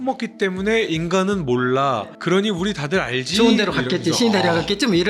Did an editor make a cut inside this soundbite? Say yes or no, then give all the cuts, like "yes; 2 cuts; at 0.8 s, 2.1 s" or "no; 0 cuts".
no; 0 cuts